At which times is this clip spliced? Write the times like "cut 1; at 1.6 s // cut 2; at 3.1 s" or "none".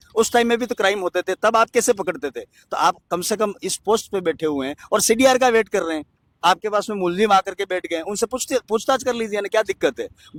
none